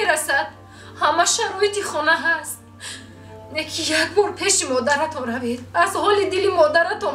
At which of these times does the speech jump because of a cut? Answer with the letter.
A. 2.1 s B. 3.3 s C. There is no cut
C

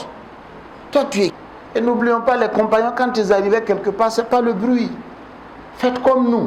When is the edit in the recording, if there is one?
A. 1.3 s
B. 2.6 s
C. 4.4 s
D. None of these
A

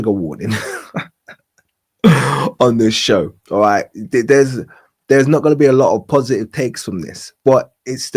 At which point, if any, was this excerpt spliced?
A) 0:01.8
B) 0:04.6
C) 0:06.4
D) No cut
D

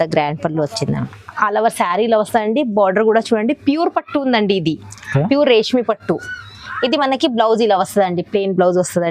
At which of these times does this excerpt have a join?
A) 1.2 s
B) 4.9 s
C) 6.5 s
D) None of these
A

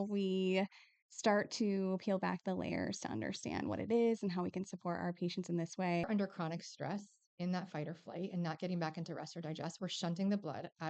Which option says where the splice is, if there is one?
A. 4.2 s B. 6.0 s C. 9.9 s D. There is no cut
B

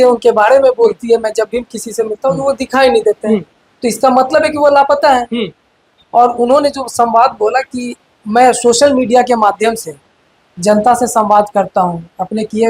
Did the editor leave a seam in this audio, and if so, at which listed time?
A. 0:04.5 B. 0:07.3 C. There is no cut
C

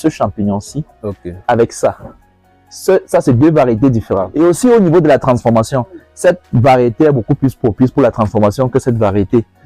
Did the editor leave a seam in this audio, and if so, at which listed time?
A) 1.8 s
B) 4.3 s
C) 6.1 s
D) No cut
B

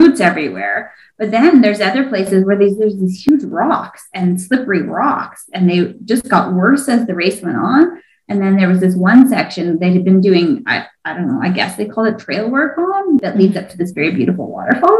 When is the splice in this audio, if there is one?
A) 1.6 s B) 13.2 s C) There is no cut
B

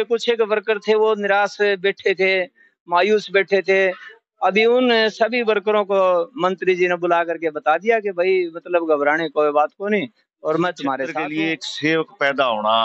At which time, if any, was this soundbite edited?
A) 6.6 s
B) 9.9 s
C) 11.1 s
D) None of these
C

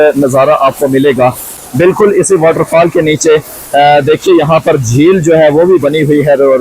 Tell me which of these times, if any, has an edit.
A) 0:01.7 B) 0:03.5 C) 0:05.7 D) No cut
D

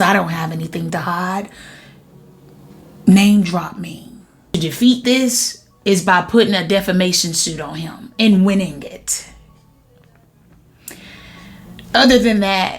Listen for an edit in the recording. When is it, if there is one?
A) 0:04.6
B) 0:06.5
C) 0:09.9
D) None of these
A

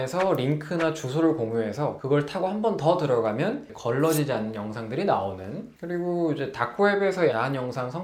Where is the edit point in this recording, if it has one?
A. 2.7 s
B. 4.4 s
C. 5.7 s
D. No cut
D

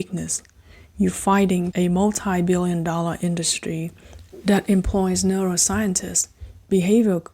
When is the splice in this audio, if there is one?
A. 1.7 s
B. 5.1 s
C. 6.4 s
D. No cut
A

